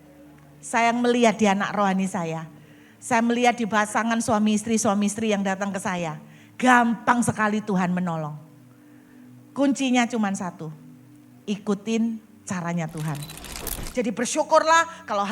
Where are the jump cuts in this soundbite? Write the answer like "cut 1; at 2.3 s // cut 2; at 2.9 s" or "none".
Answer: cut 1; at 13.8 s